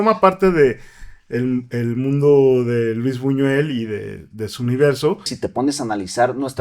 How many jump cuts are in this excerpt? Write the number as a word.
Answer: one